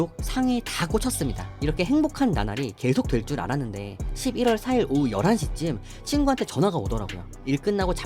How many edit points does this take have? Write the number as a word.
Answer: one